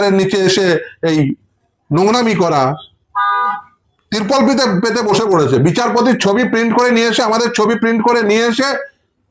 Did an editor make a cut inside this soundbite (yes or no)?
no